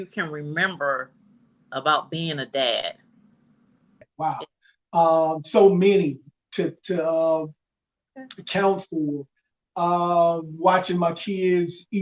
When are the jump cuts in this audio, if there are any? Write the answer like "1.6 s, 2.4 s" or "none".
4.1 s